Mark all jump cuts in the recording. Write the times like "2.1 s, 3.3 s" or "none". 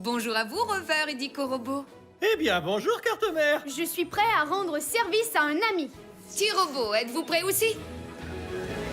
7.9 s